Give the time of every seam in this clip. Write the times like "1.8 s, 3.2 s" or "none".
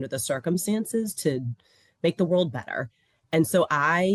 none